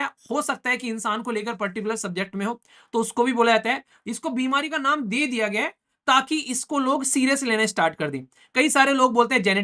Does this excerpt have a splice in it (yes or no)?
yes